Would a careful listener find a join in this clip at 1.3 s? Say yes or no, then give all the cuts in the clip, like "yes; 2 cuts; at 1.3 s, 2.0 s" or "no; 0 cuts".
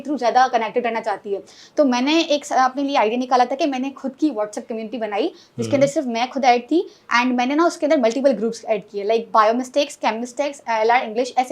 no; 0 cuts